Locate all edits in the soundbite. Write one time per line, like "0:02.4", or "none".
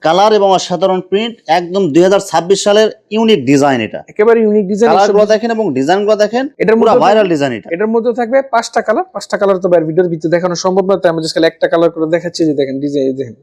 none